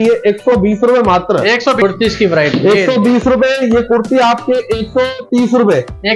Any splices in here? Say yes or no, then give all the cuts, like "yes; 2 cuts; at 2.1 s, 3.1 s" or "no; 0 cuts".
yes; 1 cut; at 1.8 s